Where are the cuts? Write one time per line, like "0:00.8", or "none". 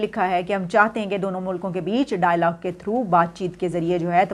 none